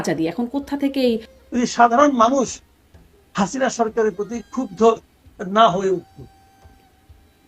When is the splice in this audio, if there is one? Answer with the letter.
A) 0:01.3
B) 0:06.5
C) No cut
A